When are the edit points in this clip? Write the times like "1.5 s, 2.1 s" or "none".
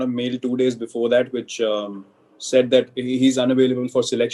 none